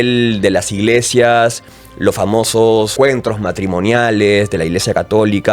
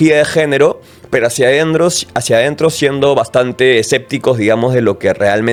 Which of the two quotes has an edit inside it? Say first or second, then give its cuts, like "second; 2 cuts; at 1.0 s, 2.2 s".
first; 1 cut; at 2.9 s